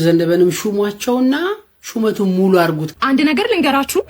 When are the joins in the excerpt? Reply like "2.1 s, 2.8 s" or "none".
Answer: 2.9 s

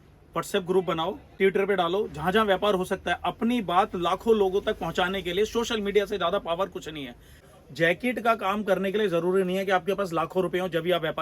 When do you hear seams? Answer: 1.3 s, 7.4 s

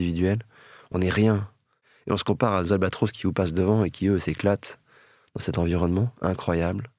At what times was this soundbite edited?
none

